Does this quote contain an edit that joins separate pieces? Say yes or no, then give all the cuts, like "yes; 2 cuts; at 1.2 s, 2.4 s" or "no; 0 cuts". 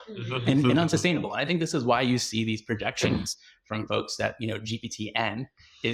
no; 0 cuts